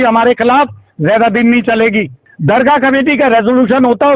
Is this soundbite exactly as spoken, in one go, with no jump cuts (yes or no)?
no